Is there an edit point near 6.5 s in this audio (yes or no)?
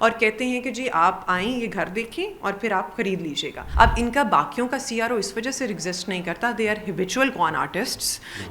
no